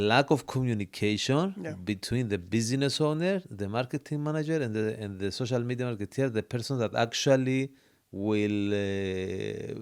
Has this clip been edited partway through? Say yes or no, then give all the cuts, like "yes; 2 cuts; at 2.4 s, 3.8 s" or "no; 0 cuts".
no; 0 cuts